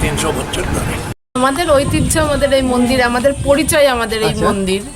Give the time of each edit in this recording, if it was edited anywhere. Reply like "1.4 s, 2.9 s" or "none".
1.2 s